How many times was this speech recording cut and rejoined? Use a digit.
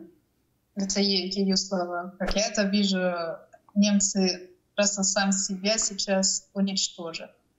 1